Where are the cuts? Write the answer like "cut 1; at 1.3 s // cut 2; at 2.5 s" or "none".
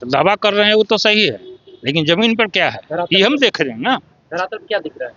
none